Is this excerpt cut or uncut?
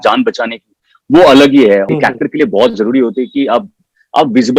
cut